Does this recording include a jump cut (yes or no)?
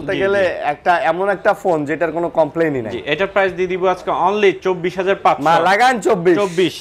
no